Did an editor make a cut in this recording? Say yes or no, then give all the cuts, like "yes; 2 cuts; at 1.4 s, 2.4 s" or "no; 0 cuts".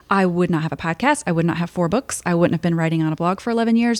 no; 0 cuts